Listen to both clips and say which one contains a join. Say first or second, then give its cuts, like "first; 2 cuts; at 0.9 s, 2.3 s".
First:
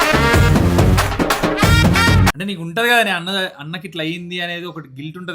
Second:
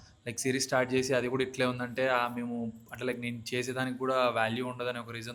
first; 1 cut; at 2.4 s